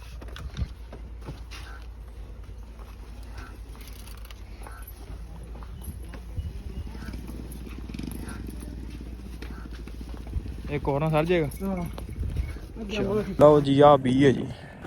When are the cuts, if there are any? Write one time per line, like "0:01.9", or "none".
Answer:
0:13.3